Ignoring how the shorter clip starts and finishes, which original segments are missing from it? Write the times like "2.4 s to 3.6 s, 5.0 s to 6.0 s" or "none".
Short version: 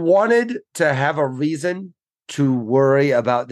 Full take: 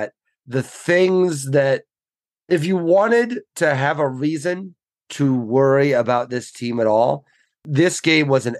none